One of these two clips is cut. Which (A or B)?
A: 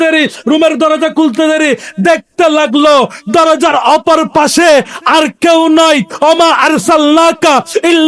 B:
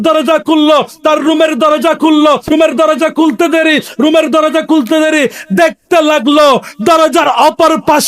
B